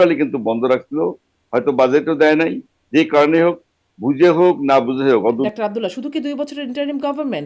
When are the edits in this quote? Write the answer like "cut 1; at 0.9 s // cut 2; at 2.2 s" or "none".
cut 1; at 5.5 s

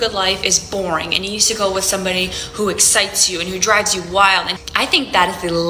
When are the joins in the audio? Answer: cut 1; at 4.6 s

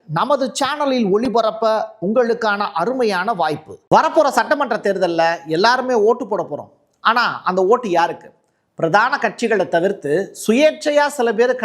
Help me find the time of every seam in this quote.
cut 1; at 3.7 s

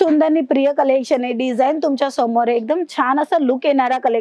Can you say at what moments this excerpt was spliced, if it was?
none

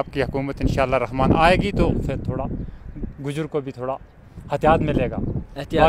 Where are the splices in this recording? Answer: none

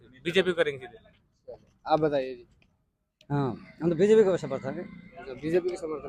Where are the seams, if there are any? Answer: none

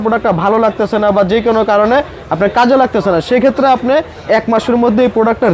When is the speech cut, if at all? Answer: none

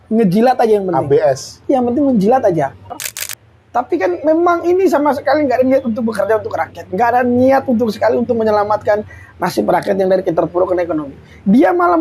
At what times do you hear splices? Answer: cut 1; at 3.0 s

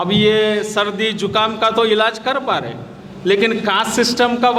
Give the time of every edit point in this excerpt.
none

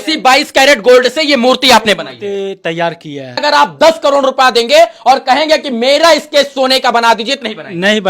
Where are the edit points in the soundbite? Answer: cut 1; at 3.4 s

